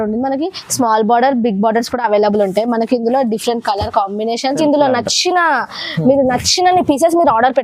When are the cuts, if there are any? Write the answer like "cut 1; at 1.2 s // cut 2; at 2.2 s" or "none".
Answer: cut 1; at 4.6 s